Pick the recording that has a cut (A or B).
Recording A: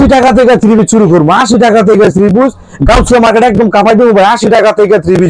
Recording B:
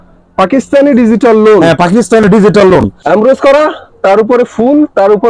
B